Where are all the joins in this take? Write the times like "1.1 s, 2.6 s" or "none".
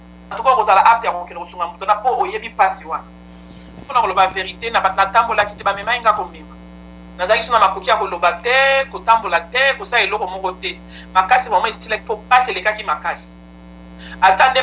3.8 s